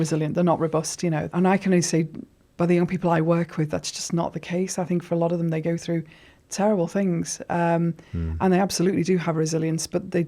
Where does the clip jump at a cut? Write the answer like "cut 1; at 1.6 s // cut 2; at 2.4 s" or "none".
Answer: cut 1; at 1.3 s